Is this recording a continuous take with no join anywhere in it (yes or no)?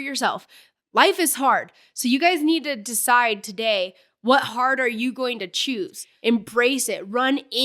no